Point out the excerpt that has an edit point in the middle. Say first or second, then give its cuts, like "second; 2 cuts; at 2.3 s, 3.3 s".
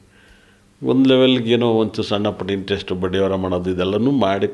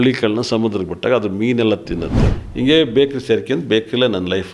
second; 1 cut; at 2.2 s